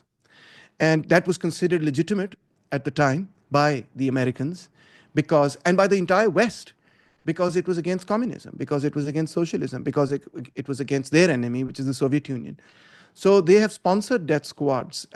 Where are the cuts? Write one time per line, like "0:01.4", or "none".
none